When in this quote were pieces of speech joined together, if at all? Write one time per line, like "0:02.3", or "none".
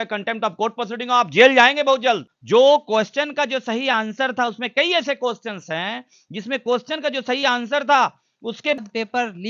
0:02.3
0:08.8